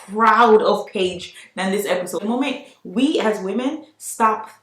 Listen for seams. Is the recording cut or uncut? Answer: cut